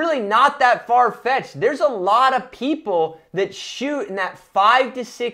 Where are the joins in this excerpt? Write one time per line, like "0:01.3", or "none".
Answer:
none